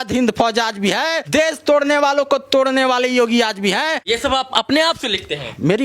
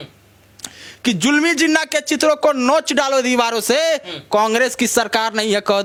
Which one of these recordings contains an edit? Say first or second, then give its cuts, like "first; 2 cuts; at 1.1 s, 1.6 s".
first; 2 cuts; at 1.3 s, 4.0 s